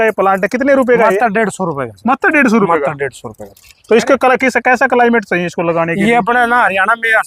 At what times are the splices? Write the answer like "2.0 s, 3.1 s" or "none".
none